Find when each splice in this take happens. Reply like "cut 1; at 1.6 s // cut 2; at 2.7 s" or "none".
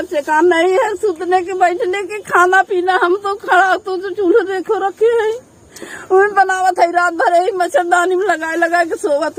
none